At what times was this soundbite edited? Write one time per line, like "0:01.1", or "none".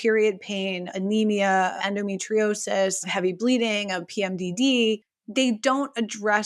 0:00.9
0:01.8
0:03.1